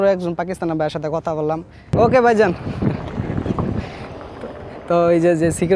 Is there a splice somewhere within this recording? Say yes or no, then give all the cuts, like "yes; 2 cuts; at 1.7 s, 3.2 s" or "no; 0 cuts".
yes; 1 cut; at 1.9 s